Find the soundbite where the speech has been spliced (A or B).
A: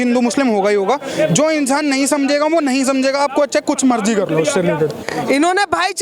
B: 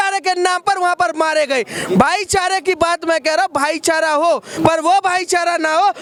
A